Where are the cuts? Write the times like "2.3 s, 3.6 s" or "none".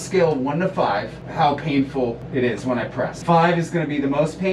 1.2 s, 2.2 s, 3.2 s